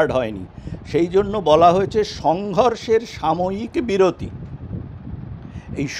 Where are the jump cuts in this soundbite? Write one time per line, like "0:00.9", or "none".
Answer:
none